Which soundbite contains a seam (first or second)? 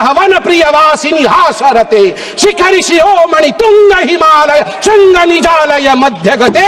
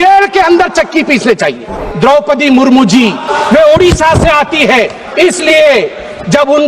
second